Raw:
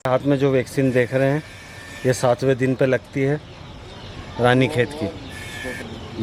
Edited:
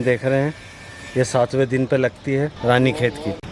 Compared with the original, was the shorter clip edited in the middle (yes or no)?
yes